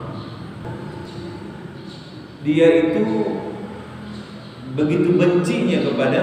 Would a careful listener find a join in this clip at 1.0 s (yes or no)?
yes